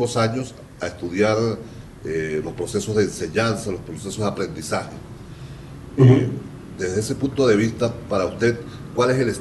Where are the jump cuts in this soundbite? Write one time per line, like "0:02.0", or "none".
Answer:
none

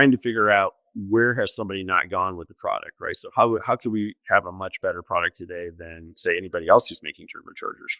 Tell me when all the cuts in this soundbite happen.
none

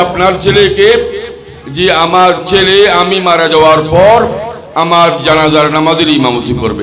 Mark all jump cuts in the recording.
none

